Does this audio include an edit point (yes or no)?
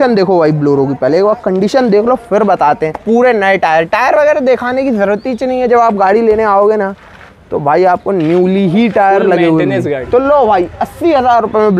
yes